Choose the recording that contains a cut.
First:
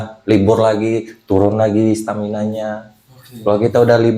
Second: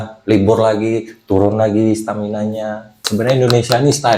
second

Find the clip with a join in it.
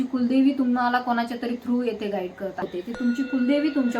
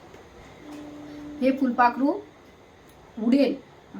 first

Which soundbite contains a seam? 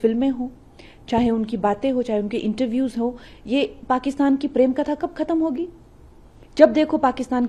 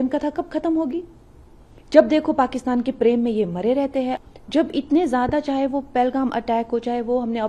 second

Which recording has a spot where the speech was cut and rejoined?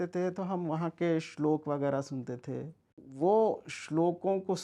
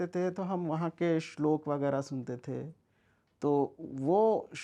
first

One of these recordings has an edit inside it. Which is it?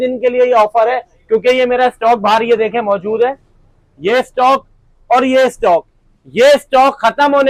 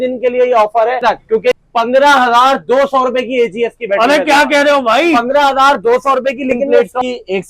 second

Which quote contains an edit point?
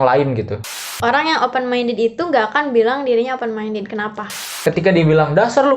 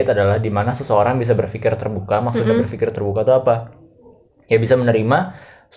first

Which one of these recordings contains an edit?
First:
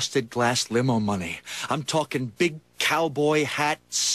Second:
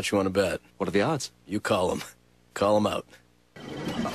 first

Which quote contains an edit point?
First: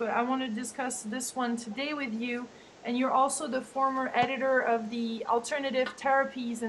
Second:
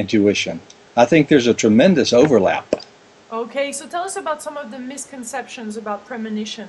second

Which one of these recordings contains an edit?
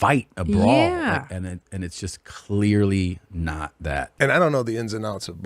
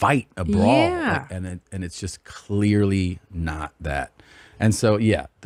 first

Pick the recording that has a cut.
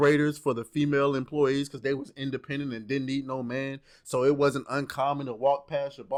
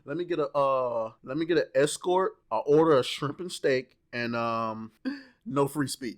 second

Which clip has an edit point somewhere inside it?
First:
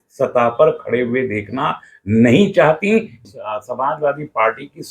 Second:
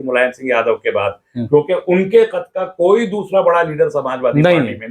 first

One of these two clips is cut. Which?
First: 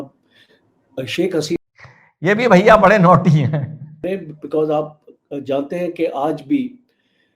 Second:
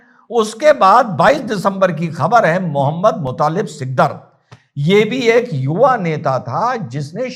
first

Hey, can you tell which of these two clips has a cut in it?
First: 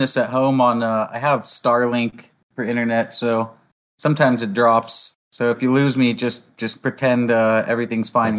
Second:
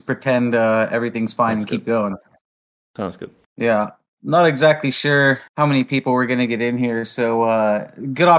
second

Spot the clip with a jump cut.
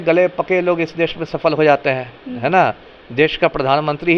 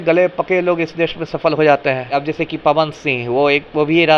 second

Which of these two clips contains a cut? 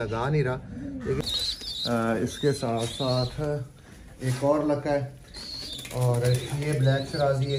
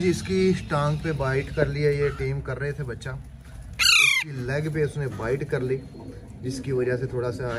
first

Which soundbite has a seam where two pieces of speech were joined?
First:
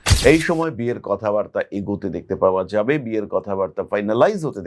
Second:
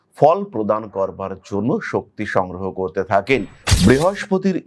second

